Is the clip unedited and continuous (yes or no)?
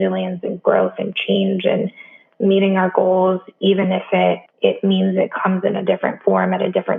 no